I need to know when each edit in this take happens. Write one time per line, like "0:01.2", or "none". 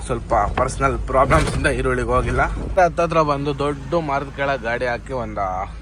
0:02.8